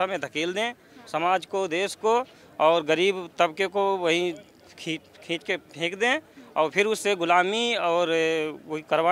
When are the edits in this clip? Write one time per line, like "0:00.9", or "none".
none